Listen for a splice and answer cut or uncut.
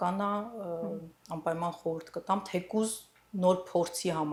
uncut